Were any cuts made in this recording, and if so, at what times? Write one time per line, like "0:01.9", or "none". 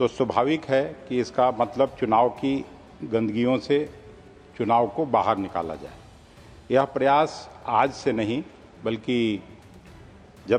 none